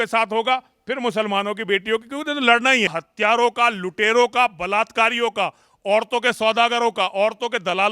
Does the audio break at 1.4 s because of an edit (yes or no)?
no